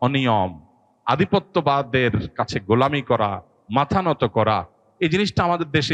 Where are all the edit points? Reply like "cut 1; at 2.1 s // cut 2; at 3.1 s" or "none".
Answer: cut 1; at 4.8 s

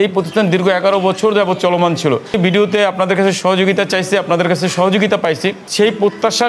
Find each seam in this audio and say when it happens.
cut 1; at 2.4 s // cut 2; at 5.7 s

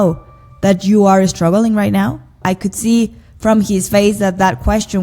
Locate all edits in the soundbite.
cut 1; at 2.3 s

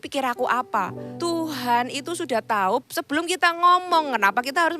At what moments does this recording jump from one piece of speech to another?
cut 1; at 1.0 s // cut 2; at 2.8 s

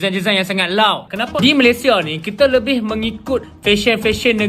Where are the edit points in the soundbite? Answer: cut 1; at 1.3 s

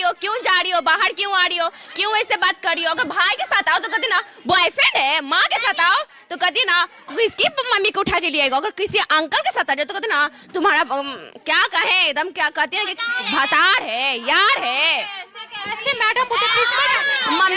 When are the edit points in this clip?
none

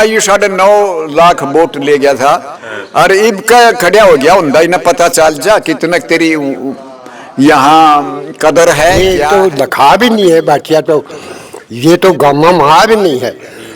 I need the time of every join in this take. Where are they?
cut 1; at 9.0 s

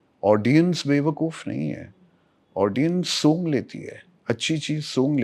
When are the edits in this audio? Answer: none

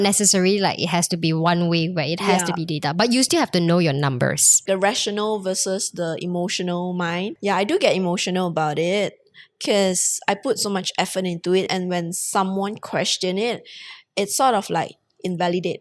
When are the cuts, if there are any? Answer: cut 1; at 4.6 s // cut 2; at 7.3 s // cut 3; at 11.7 s

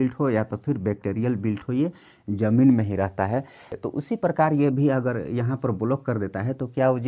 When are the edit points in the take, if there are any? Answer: cut 1; at 3.7 s

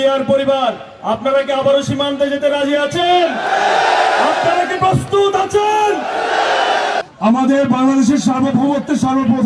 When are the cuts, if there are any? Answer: cut 1; at 7.1 s

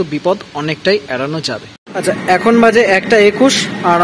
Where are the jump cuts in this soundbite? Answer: cut 1; at 1.9 s

